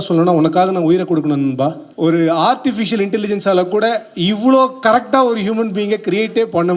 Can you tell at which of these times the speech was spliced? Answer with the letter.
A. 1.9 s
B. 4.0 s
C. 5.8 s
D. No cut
A